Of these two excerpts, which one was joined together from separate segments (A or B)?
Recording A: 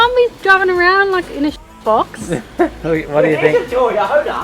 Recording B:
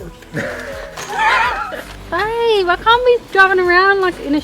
B